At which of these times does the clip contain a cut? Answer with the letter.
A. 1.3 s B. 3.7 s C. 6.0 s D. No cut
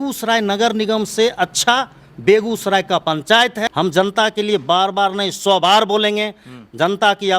B